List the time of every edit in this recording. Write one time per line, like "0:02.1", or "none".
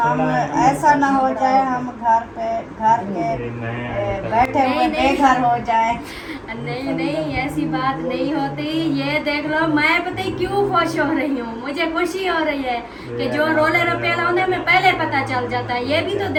none